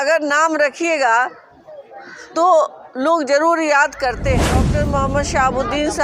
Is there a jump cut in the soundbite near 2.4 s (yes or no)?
no